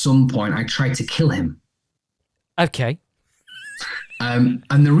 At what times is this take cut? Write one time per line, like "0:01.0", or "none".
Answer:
none